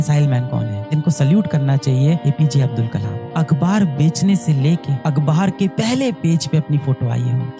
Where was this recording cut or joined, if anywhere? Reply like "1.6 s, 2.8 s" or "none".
0.9 s